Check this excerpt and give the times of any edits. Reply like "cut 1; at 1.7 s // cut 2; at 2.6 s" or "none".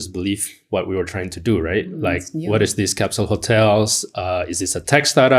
none

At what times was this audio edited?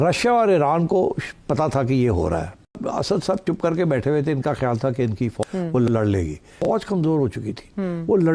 cut 1; at 2.7 s // cut 2; at 6.4 s

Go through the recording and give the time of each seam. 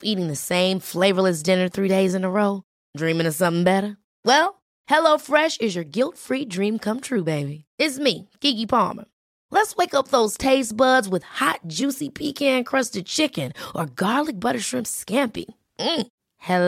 none

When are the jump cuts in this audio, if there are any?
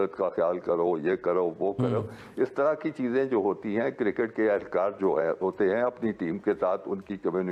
none

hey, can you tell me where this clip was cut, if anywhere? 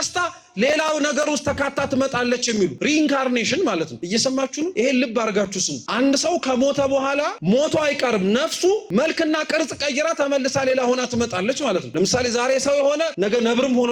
cut 1; at 2.8 s // cut 2; at 4.2 s // cut 3; at 5.8 s // cut 4; at 7.3 s // cut 5; at 8.8 s // cut 6; at 11.9 s // cut 7; at 13.1 s

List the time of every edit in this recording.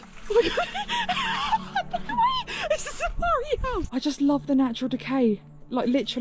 cut 1; at 3.9 s

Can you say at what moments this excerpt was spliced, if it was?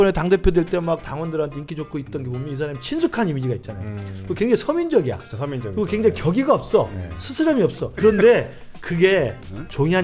cut 1; at 1.0 s // cut 2; at 8.0 s

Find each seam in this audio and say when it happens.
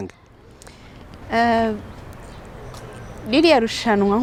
none

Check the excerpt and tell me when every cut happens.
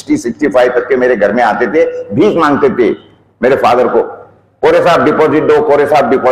none

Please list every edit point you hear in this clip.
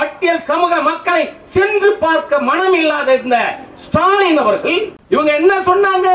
cut 1; at 4.9 s

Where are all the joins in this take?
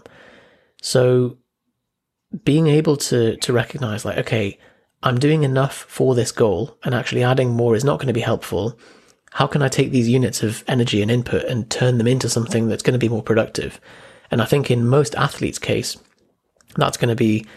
none

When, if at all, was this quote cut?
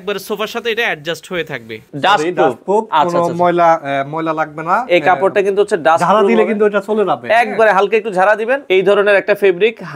cut 1; at 1.7 s // cut 2; at 8.6 s

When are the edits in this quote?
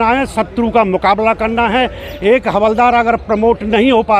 none

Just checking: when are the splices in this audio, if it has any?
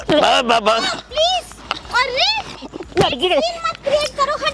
cut 1; at 2.6 s

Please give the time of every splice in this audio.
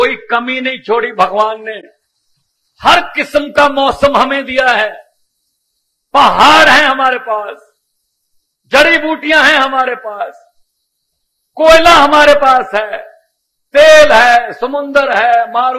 none

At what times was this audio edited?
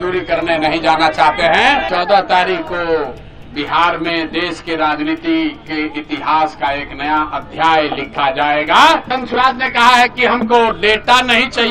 cut 1; at 1.8 s // cut 2; at 9.1 s

